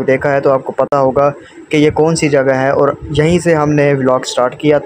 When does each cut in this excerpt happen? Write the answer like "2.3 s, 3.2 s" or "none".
none